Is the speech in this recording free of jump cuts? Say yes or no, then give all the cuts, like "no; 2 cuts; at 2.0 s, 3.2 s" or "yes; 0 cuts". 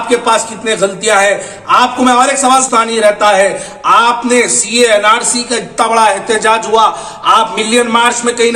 no; 1 cut; at 2.7 s